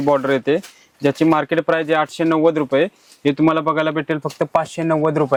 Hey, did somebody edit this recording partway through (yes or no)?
no